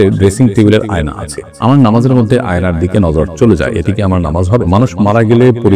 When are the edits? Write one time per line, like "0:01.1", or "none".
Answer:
0:04.7